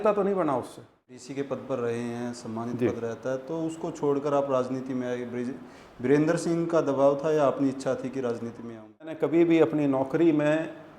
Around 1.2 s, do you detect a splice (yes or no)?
yes